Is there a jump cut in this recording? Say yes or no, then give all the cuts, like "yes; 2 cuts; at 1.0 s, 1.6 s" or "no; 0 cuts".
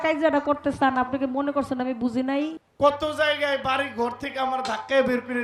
yes; 1 cut; at 2.6 s